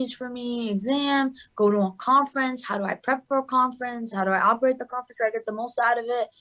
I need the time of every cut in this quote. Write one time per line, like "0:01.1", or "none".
none